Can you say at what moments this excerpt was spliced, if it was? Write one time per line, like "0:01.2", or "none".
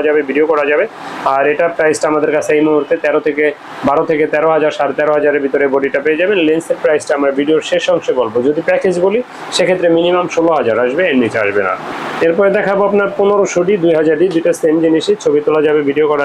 none